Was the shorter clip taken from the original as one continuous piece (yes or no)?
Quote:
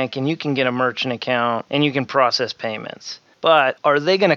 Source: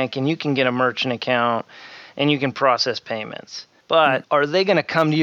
no